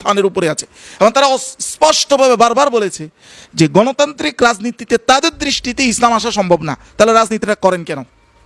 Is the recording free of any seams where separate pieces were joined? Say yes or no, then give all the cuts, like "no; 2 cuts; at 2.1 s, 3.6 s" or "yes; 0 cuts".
yes; 0 cuts